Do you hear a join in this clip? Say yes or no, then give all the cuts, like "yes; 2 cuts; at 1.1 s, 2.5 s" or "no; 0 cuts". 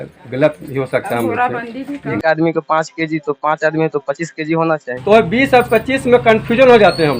yes; 2 cuts; at 2.1 s, 4.9 s